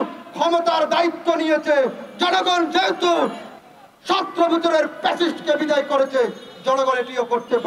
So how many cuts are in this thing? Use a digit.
0